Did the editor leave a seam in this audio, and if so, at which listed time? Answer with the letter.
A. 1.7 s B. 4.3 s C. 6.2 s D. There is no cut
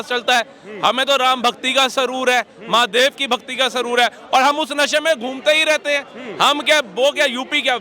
D